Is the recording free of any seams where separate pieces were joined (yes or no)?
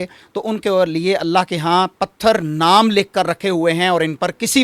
yes